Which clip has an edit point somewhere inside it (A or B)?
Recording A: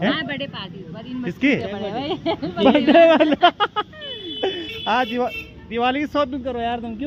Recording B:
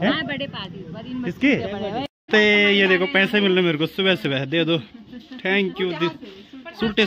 B